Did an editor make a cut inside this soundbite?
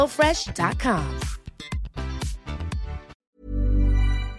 yes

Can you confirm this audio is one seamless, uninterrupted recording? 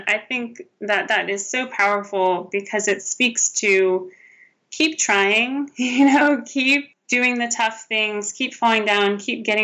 no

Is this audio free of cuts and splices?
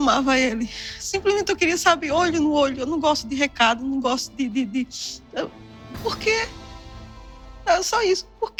yes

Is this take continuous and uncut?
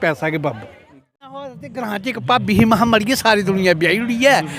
no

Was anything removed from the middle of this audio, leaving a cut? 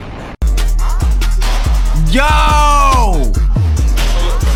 no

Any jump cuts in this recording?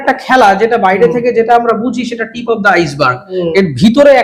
no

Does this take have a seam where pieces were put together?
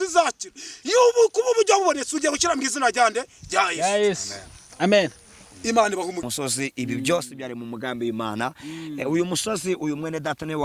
yes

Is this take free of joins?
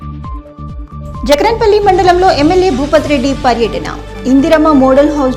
no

